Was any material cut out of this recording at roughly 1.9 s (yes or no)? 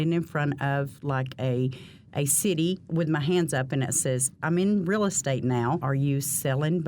no